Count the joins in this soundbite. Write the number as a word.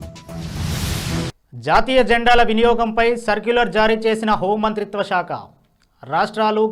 one